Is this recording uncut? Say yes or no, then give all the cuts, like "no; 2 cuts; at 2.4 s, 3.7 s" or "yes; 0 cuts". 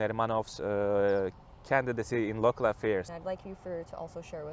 no; 1 cut; at 3.1 s